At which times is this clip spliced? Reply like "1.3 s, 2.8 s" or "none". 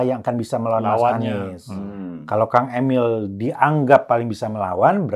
none